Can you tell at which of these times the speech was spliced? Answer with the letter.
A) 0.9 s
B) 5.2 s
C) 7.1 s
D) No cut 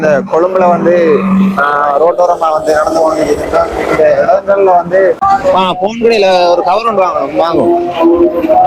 B